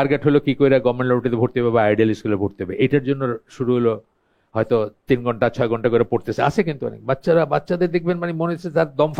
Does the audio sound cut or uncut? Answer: uncut